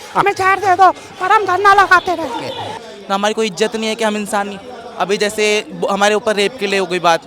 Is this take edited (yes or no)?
yes